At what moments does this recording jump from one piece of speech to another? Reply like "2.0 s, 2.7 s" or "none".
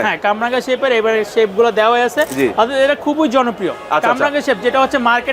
none